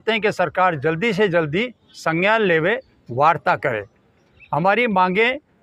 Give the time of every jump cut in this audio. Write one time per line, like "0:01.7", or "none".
none